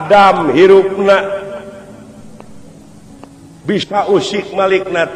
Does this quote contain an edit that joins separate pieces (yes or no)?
no